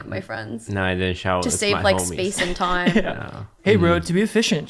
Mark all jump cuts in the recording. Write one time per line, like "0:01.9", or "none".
0:03.5